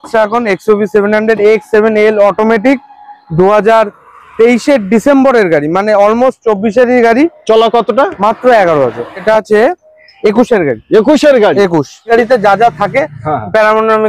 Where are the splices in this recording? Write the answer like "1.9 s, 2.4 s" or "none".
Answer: 9.2 s, 12.1 s